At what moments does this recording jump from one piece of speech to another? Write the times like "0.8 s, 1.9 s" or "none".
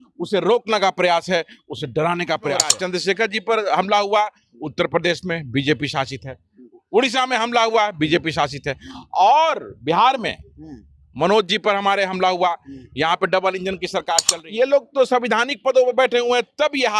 2.7 s, 14.2 s